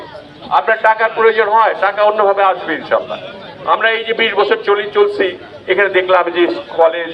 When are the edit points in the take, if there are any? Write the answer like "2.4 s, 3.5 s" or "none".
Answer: none